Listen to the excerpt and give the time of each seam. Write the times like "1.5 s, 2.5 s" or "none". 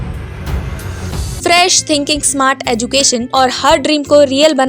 1.2 s, 3.3 s